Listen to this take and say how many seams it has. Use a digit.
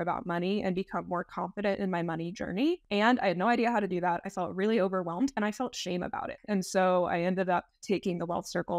2